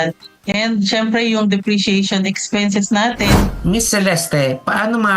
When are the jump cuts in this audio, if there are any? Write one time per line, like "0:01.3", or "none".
0:03.6